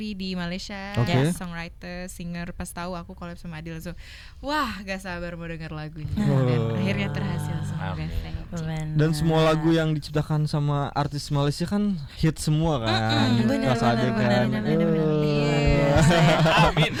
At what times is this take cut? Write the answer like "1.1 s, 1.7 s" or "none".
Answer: none